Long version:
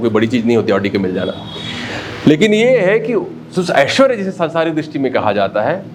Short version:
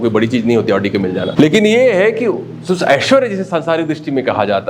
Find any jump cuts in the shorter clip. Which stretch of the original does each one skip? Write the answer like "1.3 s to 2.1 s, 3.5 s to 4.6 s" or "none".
1.3 s to 2.2 s